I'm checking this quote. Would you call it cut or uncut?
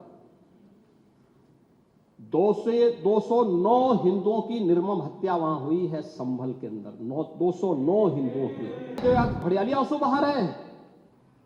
cut